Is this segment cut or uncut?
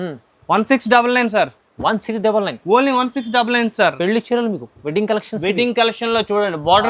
uncut